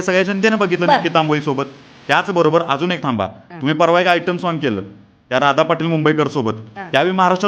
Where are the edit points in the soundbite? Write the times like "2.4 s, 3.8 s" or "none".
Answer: none